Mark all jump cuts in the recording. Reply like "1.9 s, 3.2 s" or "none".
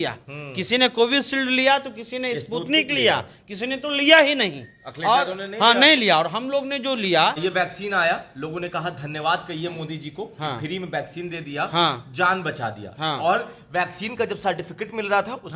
7.4 s